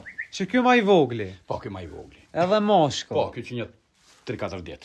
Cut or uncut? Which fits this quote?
uncut